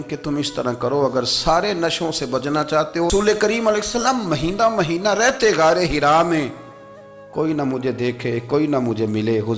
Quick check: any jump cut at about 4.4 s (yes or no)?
no